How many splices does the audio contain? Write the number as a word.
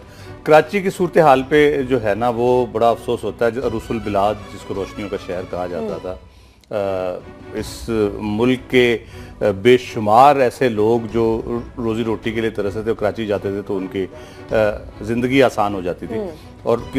zero